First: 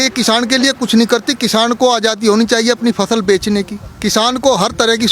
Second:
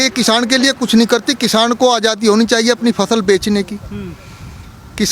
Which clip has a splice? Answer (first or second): first